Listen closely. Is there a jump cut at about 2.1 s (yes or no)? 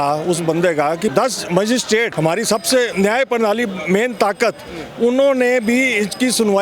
yes